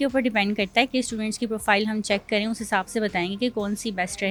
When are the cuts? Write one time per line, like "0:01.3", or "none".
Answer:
none